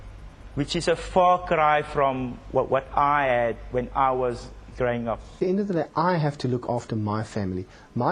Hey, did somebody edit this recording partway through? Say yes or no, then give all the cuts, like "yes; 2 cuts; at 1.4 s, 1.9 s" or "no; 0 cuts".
yes; 1 cut; at 5.4 s